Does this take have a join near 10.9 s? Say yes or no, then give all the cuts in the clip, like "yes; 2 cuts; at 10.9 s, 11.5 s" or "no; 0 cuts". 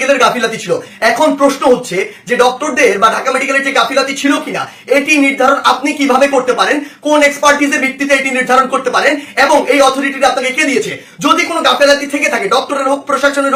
no; 0 cuts